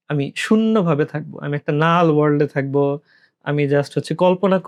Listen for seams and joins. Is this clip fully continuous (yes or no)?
yes